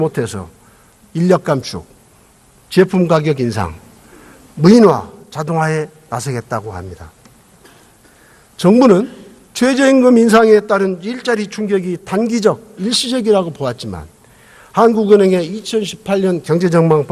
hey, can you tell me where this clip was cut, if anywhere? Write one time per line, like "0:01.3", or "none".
0:05.9

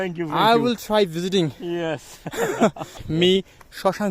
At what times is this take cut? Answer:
0:03.0

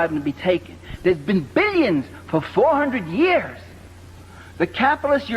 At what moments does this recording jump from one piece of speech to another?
none

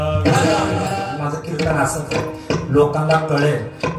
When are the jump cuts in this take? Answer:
0:00.9

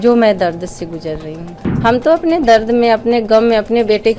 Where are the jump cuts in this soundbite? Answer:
0:01.6

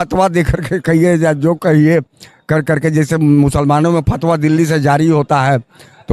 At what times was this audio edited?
none

